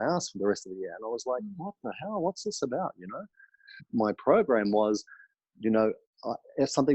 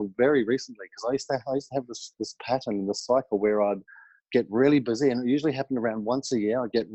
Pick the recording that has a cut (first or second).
first